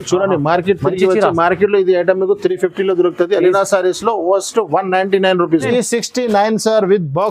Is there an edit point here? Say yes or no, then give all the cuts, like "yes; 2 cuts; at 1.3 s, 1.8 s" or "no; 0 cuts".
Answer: yes; 1 cut; at 5.7 s